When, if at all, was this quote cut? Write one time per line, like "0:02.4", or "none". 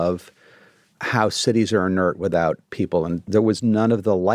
0:02.7